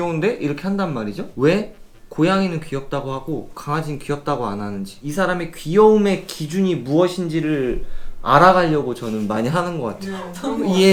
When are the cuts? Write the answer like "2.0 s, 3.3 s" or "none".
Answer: none